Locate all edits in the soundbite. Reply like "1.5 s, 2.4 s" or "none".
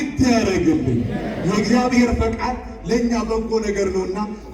none